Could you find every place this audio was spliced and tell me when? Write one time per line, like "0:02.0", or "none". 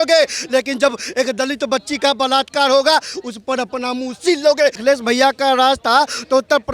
0:04.8